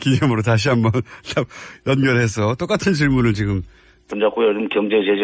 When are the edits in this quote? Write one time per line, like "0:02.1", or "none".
none